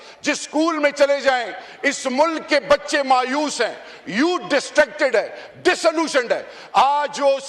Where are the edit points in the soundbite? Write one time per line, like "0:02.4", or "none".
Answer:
none